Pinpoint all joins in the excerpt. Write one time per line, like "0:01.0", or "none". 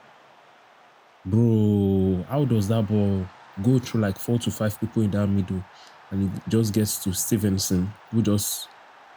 0:01.2